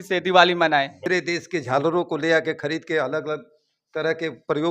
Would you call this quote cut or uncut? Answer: cut